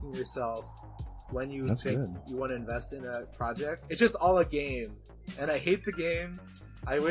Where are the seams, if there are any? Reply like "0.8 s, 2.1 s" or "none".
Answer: 3.8 s